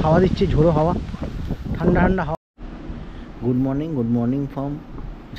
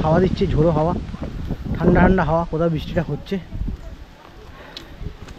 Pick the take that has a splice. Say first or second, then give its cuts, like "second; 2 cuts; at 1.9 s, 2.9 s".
first; 1 cut; at 2.3 s